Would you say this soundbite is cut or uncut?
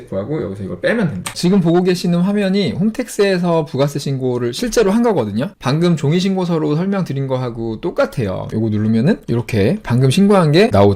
cut